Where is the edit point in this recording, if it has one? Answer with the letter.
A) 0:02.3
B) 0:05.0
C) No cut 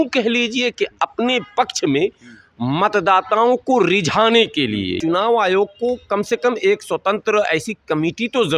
B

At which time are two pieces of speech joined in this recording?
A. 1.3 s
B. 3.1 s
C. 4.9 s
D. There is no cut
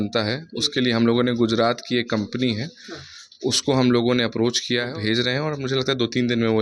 C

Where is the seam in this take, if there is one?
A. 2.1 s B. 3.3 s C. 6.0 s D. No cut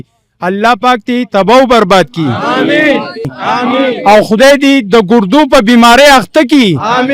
B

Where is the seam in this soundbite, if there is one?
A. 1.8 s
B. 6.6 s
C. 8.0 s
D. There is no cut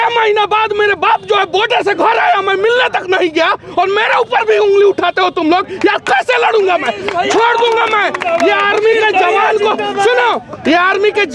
D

